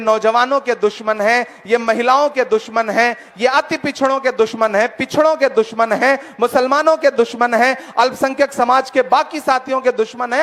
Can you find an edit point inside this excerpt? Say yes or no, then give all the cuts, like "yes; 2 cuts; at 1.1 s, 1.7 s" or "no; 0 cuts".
no; 0 cuts